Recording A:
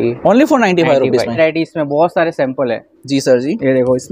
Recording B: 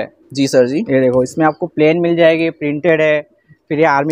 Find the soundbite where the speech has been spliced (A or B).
A